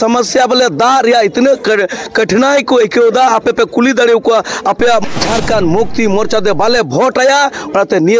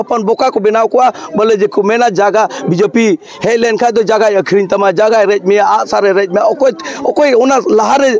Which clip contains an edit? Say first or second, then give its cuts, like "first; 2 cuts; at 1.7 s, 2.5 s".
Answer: first; 1 cut; at 5.0 s